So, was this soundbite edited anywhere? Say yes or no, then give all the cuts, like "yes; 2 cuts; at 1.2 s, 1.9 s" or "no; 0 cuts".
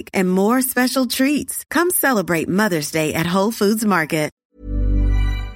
yes; 1 cut; at 4.4 s